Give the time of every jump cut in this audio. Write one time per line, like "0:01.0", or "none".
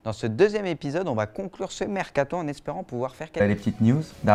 none